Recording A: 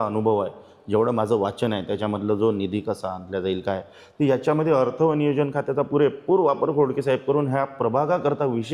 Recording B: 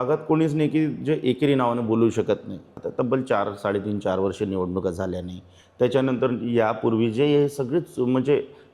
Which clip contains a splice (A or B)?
B